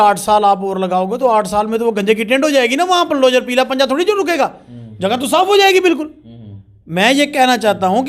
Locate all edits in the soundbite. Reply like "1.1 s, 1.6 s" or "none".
none